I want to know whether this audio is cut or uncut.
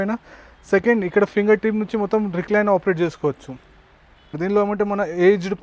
cut